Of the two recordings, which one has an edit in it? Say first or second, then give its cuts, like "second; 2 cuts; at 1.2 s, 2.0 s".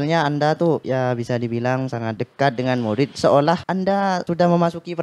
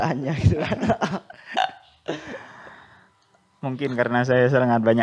first; 3 cuts; at 0.8 s, 2.2 s, 4.1 s